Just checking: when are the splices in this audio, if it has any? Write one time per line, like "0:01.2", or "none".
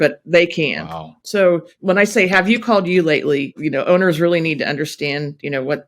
0:01.1
0:01.7
0:03.6